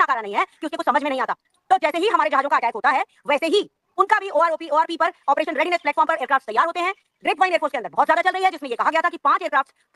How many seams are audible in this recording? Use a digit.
0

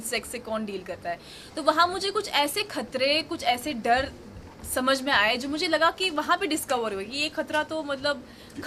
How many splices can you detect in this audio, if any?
0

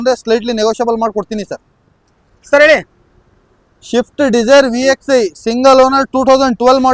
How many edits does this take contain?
0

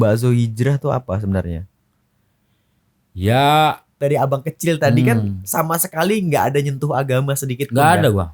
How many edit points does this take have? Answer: 1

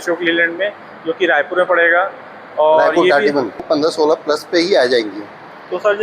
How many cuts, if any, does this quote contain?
1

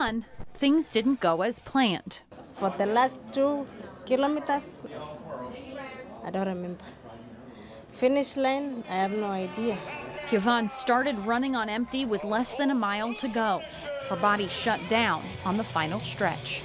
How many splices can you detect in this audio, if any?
0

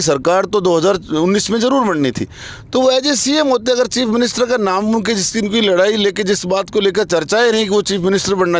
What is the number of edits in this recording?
0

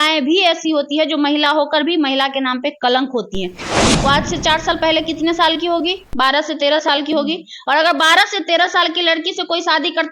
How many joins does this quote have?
1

